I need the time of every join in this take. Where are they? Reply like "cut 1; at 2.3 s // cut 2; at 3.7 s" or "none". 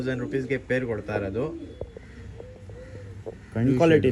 cut 1; at 2.0 s